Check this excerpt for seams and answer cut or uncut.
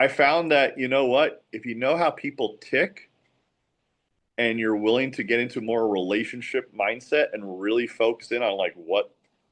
uncut